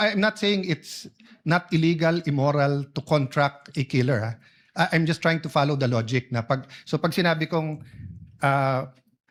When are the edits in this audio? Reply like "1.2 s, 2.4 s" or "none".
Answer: none